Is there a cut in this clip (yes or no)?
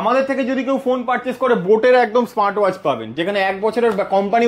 no